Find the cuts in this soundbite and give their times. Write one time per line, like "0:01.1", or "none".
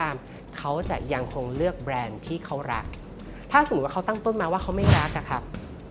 none